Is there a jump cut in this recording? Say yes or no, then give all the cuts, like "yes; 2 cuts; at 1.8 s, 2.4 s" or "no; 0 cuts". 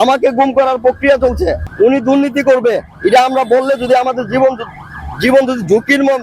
yes; 1 cut; at 1.6 s